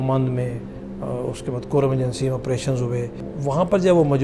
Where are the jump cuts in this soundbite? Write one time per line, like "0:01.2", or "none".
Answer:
0:03.3